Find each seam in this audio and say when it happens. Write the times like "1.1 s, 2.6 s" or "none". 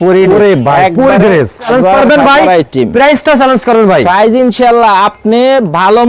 1.7 s